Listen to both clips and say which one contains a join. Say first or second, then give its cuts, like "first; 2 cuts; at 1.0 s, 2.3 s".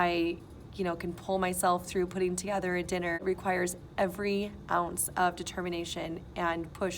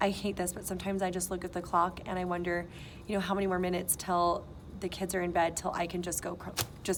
first; 1 cut; at 3.2 s